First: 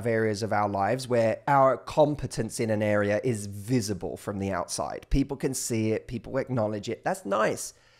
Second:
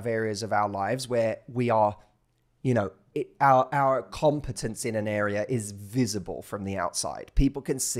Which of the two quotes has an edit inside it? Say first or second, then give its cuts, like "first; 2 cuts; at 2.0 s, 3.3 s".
first; 1 cut; at 1.4 s